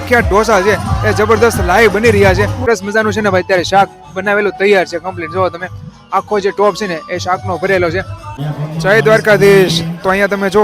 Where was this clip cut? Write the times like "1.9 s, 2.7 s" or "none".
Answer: 2.6 s, 8.3 s